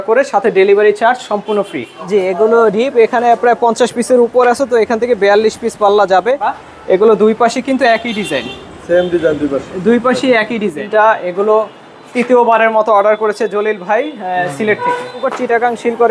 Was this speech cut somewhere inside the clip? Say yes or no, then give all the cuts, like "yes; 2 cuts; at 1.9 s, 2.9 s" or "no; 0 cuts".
yes; 4 cuts; at 1.9 s, 6.6 s, 10.8 s, 15.3 s